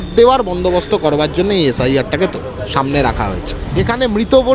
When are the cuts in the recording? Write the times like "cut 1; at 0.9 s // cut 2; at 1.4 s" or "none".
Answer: cut 1; at 3.6 s